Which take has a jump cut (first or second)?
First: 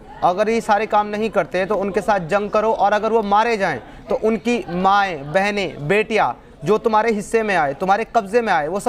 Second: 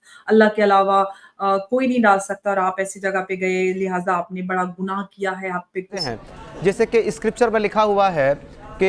second